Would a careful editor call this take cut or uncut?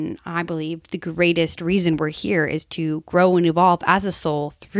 uncut